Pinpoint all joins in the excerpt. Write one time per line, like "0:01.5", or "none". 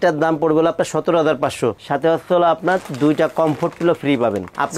0:01.8